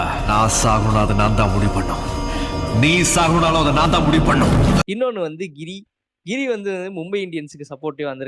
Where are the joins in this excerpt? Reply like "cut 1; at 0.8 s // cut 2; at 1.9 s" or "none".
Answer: none